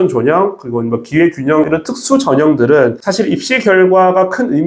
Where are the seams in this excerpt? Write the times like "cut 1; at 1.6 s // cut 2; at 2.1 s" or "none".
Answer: cut 1; at 1.7 s // cut 2; at 3.0 s